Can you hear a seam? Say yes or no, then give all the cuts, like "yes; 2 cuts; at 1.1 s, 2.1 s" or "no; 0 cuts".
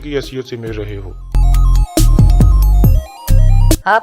yes; 1 cut; at 2.6 s